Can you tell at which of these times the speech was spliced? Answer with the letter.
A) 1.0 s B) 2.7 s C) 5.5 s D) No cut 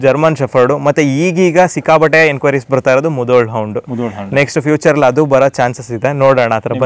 D